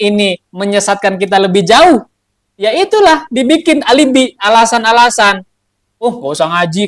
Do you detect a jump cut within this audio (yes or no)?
no